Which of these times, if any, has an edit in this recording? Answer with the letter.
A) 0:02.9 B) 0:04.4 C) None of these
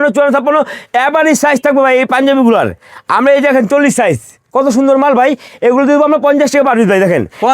C